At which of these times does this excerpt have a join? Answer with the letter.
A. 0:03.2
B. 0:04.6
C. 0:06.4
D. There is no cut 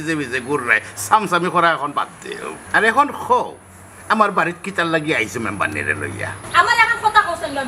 C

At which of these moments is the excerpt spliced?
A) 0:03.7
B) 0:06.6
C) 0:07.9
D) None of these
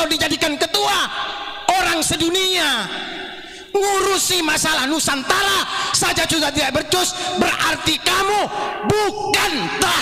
D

